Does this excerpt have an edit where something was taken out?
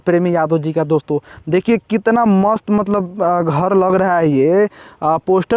no; 0 cuts

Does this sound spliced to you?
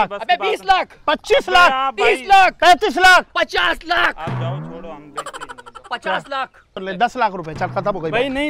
yes; 1 cut; at 6.8 s

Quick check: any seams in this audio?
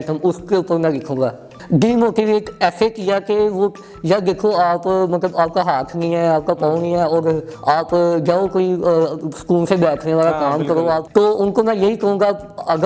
yes; 2 cuts; at 1.5 s, 11.0 s

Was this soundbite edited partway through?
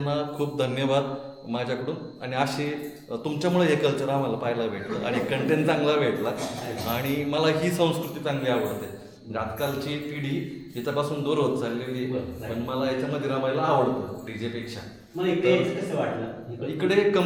no; 0 cuts

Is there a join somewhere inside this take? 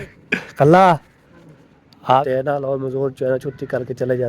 yes; 1 cut; at 2.2 s

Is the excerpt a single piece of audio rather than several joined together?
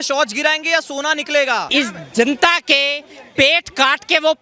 no; 1 cut; at 1.7 s

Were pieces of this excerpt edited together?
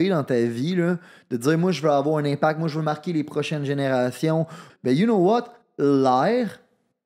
yes; 1 cut; at 4.7 s

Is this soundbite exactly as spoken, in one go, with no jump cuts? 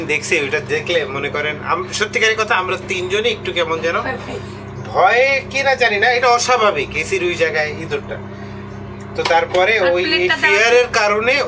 yes; 0 cuts

